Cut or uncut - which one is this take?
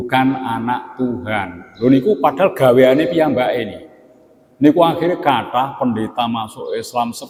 uncut